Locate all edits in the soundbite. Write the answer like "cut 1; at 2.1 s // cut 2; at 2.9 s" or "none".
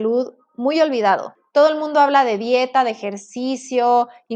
cut 1; at 1.4 s